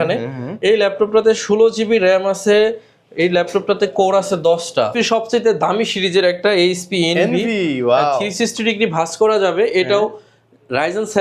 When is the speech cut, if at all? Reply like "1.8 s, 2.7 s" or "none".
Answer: 4.9 s